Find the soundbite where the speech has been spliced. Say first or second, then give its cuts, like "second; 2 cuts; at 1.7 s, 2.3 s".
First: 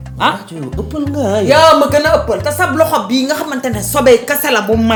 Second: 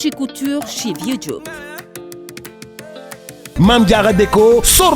second; 1 cut; at 3.5 s